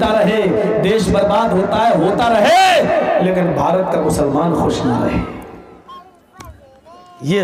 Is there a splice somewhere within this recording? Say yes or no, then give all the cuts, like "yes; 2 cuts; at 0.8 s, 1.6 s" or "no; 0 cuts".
no; 0 cuts